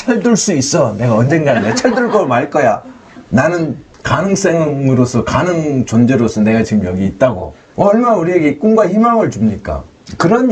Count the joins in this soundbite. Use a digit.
0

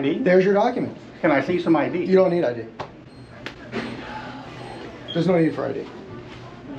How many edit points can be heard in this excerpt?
0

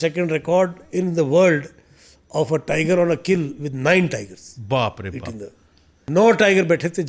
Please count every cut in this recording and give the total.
1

